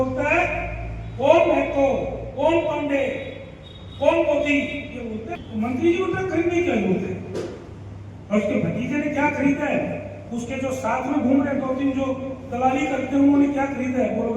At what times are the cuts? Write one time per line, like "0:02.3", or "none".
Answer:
0:05.4